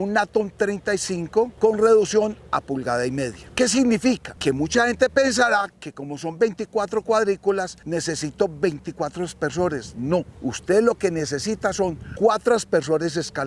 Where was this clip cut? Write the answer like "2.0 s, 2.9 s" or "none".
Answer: 1.5 s, 4.3 s, 7.8 s, 10.3 s, 12.0 s